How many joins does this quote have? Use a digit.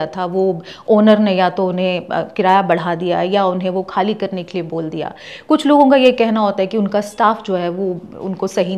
0